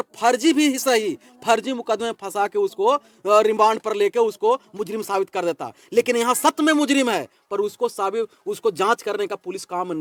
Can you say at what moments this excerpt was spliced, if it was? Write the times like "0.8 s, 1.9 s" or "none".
none